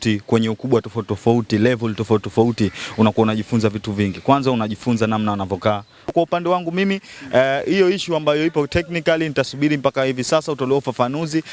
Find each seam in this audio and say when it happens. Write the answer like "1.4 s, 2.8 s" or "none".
6.1 s